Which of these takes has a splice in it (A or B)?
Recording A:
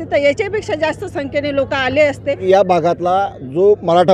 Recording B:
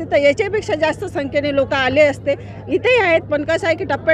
A